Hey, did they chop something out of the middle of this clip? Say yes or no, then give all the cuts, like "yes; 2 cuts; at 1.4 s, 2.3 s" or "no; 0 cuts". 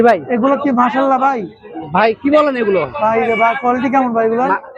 no; 0 cuts